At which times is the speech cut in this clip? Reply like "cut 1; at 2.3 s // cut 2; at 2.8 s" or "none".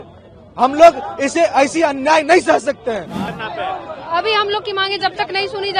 cut 1; at 3.2 s

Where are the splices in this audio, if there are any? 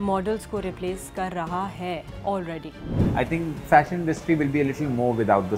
cut 1; at 2.9 s

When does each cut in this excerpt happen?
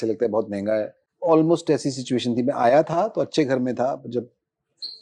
cut 1; at 1.0 s

